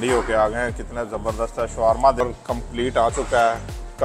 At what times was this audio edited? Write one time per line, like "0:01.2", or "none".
0:02.2